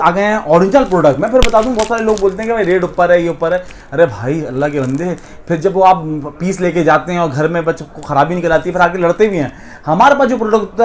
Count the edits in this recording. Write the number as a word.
zero